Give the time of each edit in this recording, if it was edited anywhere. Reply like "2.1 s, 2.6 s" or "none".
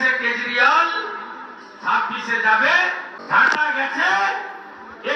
3.1 s